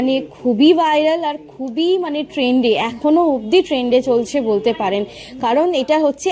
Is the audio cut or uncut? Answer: uncut